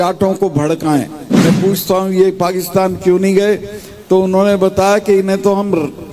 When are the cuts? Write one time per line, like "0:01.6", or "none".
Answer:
0:01.3